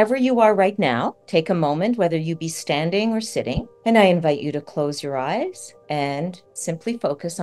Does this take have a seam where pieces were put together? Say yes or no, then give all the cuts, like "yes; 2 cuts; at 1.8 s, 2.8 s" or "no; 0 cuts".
yes; 4 cuts; at 1.2 s, 3.7 s, 5.7 s, 6.5 s